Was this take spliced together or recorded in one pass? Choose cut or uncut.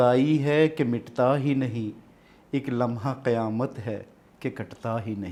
uncut